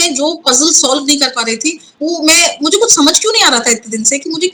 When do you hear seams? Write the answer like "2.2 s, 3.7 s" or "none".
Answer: none